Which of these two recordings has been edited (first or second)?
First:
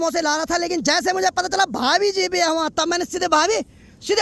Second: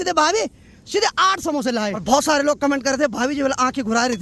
second